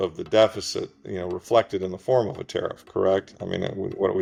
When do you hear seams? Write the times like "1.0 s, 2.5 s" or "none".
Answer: none